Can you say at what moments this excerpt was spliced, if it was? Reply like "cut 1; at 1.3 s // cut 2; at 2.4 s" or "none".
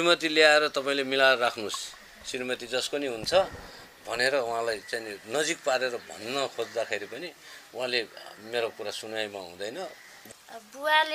cut 1; at 10.1 s

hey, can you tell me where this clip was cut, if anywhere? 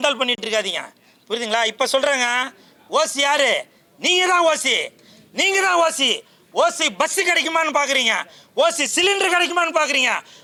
none

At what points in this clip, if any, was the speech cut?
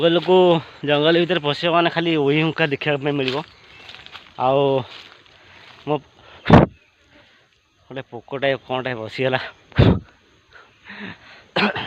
none

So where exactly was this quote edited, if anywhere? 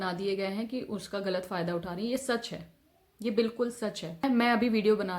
cut 1; at 4.2 s

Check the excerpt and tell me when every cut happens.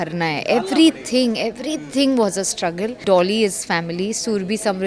cut 1; at 3.0 s

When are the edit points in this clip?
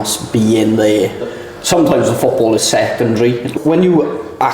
cut 1; at 1.3 s // cut 2; at 3.5 s

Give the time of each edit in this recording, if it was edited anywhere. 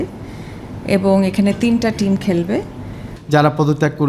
cut 1; at 3.1 s

